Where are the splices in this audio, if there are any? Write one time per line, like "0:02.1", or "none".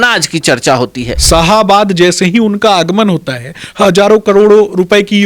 0:01.1